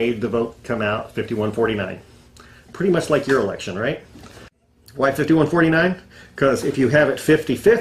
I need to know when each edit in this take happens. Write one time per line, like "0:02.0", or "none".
0:01.6